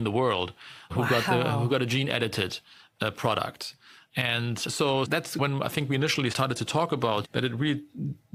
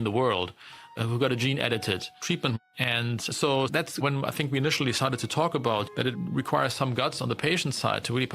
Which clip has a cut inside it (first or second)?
second